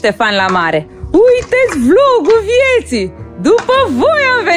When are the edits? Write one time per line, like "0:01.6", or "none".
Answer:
0:01.0